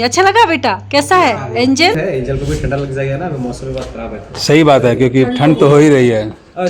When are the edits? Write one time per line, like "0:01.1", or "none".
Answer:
0:02.0